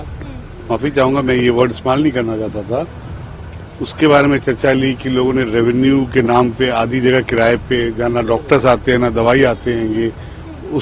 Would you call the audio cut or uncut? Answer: uncut